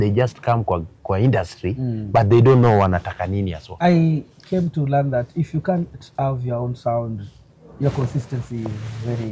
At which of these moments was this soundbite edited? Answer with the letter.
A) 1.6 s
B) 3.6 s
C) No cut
B